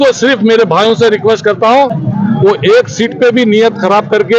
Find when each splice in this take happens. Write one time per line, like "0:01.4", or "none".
0:02.0

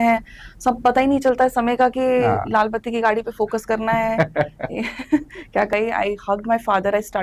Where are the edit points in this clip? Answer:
0:05.7

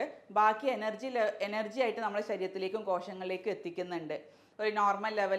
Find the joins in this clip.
0:04.4

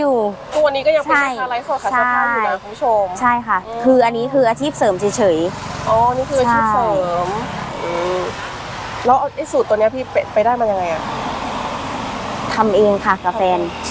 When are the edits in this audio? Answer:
0:07.7

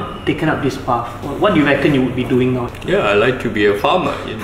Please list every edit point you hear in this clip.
0:01.1
0:02.6

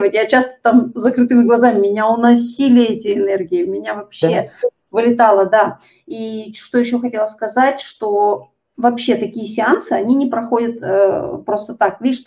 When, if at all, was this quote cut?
none

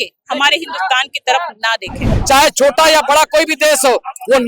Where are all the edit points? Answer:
0:02.1

